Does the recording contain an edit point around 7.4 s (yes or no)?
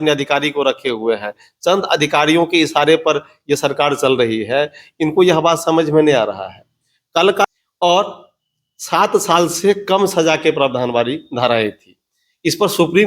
yes